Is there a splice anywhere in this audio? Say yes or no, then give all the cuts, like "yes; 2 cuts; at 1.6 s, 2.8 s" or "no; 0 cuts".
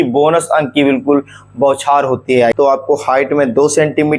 yes; 1 cut; at 2.5 s